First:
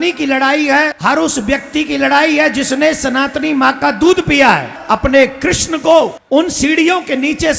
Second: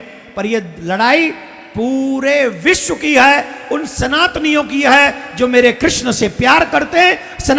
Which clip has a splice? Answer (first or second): first